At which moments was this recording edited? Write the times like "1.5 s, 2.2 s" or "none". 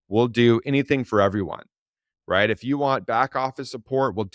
none